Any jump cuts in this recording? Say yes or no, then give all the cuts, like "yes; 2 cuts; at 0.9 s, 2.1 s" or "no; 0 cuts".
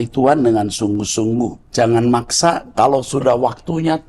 yes; 1 cut; at 1.6 s